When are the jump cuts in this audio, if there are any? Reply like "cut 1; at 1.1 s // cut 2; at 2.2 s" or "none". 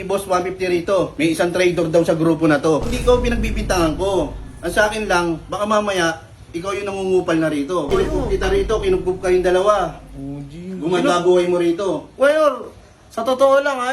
cut 1; at 1.1 s // cut 2; at 2.9 s // cut 3; at 7.9 s